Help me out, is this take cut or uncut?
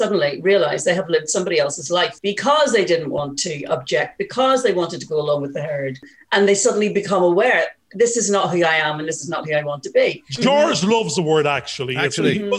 cut